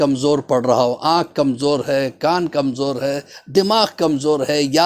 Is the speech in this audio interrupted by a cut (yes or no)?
no